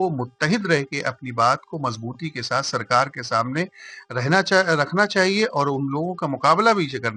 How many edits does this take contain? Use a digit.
0